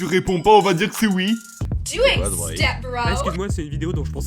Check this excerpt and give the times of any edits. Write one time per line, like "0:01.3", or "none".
0:01.8